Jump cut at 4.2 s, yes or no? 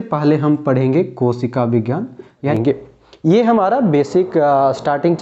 no